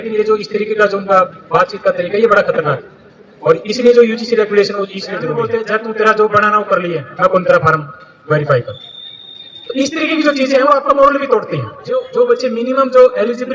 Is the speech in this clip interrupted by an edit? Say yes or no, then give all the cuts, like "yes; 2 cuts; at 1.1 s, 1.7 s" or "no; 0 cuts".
yes; 2 cuts; at 5.2 s, 12.0 s